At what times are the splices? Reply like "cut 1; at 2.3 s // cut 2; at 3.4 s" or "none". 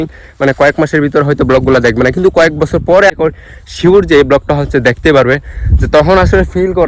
cut 1; at 3.1 s